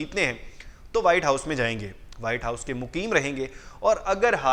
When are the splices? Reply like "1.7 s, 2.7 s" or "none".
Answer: none